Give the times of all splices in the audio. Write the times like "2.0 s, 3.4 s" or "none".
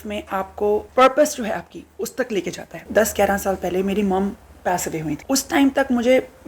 0.9 s, 2.9 s, 5.2 s